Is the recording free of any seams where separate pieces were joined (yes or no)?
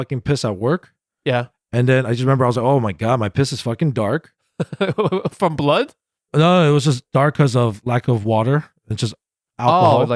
yes